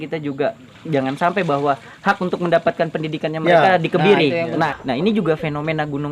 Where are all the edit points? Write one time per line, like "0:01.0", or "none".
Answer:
0:04.7